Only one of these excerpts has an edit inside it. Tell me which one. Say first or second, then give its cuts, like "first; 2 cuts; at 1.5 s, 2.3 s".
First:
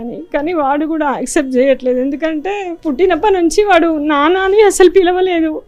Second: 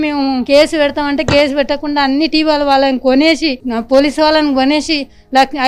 first; 1 cut; at 2.7 s